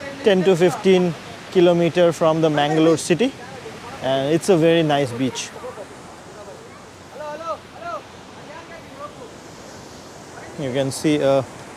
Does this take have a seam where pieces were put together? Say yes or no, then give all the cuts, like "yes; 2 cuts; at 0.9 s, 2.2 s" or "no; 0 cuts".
no; 0 cuts